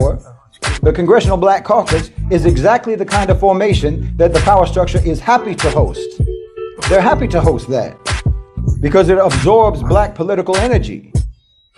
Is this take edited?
no; 0 cuts

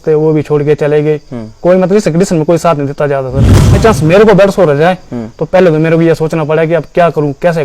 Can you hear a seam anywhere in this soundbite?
yes; 1 cut; at 3.8 s

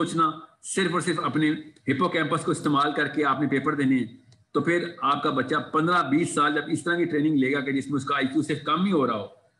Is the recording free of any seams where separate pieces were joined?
yes; 0 cuts

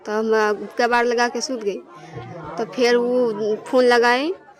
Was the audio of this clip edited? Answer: no; 0 cuts

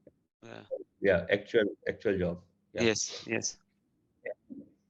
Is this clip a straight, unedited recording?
yes; 0 cuts

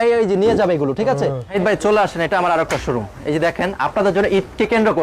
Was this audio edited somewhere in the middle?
yes; 1 cut; at 1.4 s

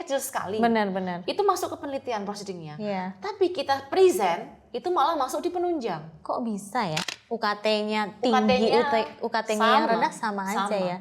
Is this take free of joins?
no; 1 cut; at 7.0 s

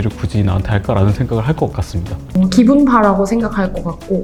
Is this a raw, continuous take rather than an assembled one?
yes; 0 cuts

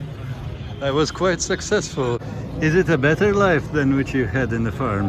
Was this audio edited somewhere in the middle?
yes; 1 cut; at 2.2 s

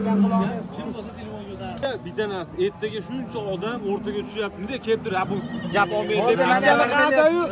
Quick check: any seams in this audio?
yes; 1 cut; at 1.8 s

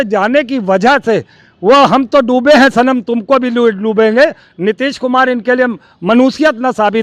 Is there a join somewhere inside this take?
no; 0 cuts

